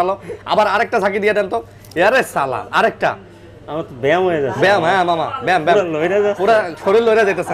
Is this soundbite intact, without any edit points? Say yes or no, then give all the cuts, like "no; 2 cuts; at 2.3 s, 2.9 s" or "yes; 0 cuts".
yes; 0 cuts